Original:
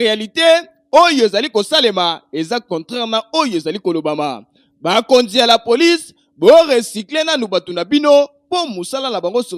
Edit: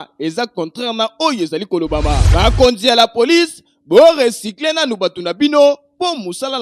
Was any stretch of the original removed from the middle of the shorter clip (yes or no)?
yes